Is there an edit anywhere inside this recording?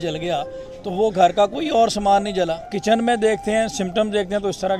yes; 1 cut; at 2.7 s

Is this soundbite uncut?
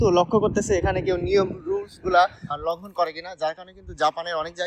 no; 1 cut; at 2.5 s

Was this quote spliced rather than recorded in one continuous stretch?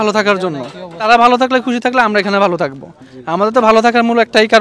yes; 1 cut; at 1.0 s

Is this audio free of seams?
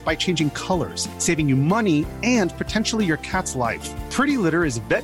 yes; 0 cuts

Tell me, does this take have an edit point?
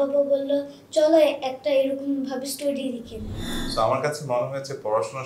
yes; 1 cut; at 3.4 s

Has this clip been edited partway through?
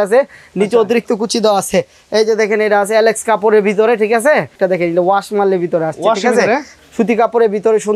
yes; 2 cuts; at 4.6 s, 6.7 s

